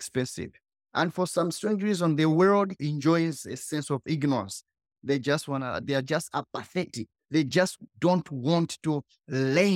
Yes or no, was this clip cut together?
no